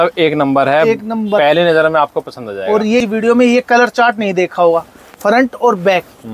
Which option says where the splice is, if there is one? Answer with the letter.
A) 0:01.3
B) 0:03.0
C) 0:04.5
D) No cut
B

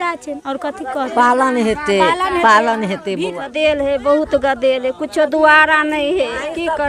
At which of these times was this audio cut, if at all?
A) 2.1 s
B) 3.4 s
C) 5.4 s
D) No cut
B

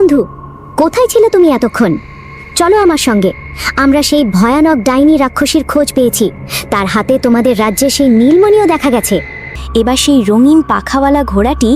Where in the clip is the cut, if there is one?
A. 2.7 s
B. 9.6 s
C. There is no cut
B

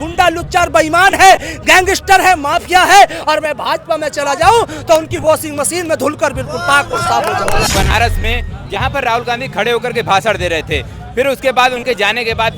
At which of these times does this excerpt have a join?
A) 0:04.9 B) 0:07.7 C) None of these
B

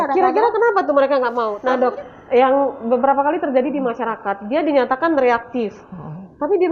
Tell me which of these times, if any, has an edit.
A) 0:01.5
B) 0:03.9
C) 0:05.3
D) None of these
A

